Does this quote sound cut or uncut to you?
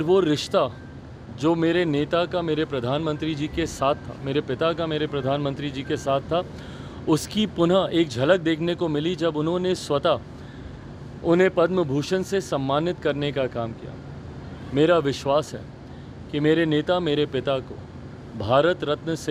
uncut